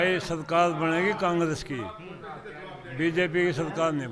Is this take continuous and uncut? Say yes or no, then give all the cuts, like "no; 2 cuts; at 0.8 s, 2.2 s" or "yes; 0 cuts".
yes; 0 cuts